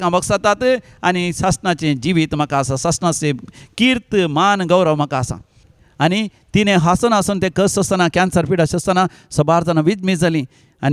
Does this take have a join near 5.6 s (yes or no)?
yes